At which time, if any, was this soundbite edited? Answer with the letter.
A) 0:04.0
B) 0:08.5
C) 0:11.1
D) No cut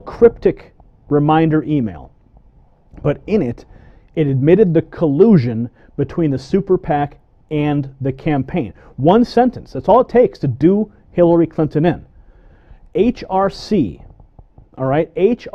A